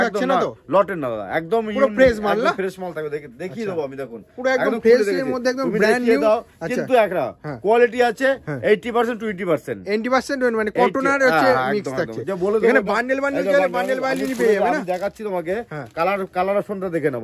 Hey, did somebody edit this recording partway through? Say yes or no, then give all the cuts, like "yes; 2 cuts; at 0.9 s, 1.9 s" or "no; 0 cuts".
no; 0 cuts